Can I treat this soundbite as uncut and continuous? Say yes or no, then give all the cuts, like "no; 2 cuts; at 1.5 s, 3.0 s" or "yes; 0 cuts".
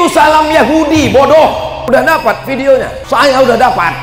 no; 2 cuts; at 1.8 s, 3.0 s